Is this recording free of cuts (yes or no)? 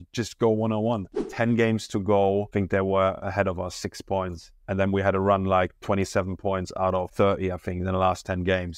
no